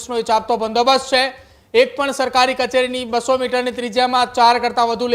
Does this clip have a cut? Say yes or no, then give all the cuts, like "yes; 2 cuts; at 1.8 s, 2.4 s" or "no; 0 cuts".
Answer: no; 0 cuts